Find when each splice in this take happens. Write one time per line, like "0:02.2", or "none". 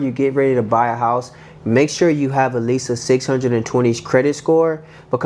none